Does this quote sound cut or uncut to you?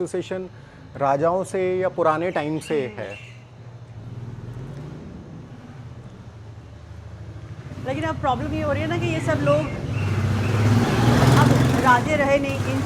uncut